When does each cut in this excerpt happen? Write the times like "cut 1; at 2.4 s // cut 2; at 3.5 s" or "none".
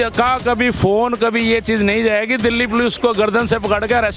none